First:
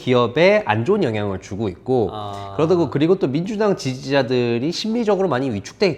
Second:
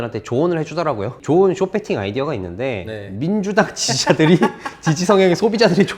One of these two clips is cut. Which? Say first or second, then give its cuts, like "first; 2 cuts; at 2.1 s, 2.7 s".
second; 1 cut; at 1.2 s